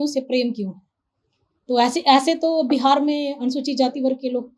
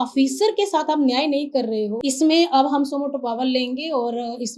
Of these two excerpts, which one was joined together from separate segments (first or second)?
second